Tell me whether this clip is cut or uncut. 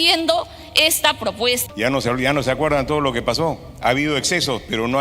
cut